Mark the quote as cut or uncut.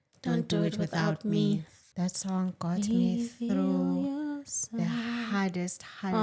cut